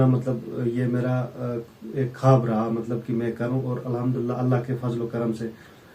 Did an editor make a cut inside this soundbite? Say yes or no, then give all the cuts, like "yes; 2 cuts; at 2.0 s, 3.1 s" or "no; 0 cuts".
no; 0 cuts